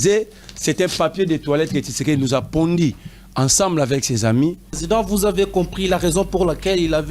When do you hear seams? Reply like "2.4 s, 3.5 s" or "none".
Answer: 4.7 s